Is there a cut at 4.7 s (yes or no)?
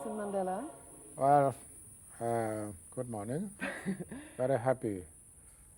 no